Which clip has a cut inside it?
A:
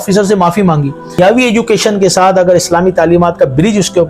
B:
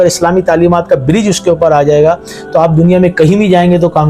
A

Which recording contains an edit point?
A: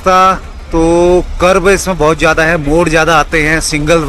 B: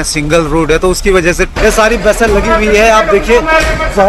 B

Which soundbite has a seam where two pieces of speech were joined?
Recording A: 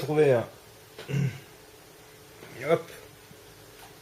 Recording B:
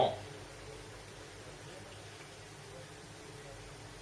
B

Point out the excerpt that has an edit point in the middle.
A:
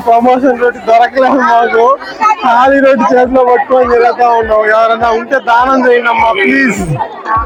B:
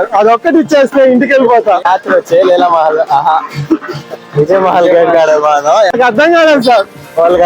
B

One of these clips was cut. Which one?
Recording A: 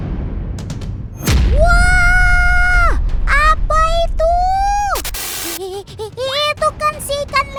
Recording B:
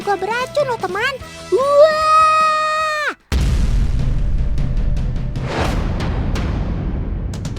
B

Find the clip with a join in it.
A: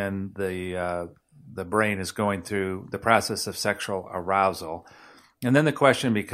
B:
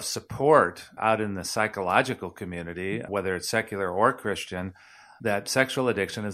B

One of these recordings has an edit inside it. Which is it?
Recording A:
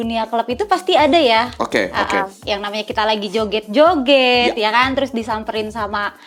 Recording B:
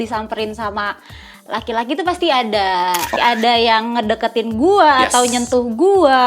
B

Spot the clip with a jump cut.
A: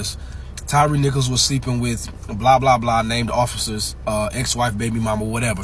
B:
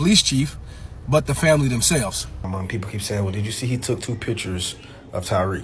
B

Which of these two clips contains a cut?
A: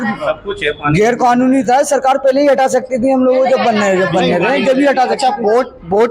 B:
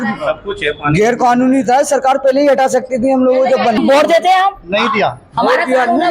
B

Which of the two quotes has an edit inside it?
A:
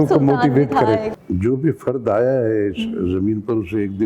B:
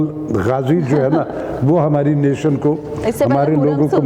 A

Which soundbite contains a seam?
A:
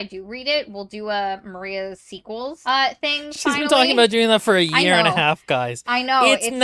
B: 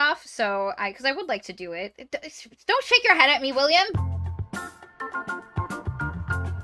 B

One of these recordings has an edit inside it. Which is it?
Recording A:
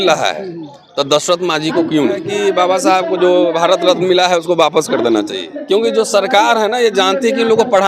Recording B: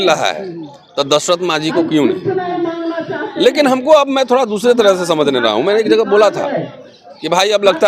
A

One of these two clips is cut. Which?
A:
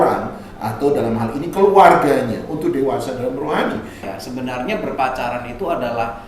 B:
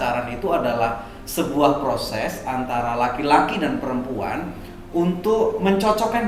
A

